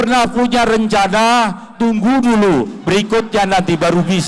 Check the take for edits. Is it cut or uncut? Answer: uncut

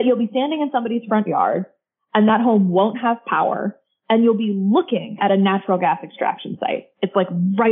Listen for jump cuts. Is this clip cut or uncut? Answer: uncut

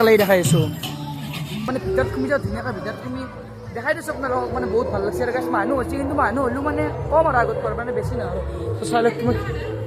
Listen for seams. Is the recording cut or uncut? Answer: cut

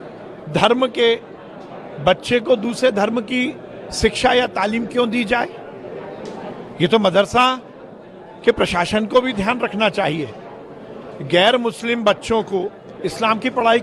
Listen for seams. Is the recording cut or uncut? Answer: uncut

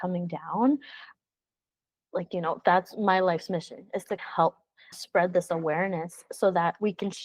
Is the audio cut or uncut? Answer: cut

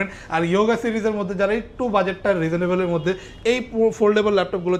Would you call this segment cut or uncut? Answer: uncut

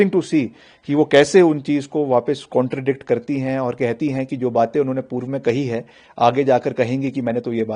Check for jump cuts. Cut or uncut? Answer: uncut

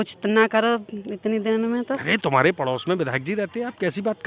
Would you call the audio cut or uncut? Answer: uncut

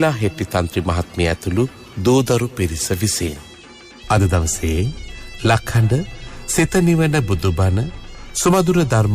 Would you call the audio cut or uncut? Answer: cut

